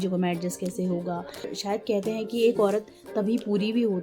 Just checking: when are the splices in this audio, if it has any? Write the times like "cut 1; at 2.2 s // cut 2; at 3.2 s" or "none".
cut 1; at 1.5 s